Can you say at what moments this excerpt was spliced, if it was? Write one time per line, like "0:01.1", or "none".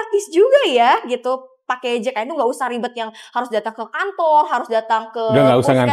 none